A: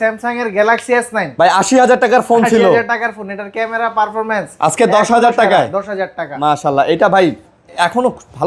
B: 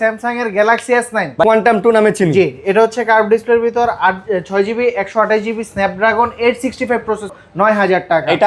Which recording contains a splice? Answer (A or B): B